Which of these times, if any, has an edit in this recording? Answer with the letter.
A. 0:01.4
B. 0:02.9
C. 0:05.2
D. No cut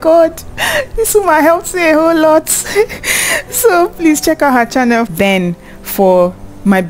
D